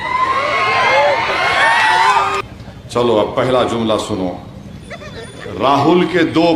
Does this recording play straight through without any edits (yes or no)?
no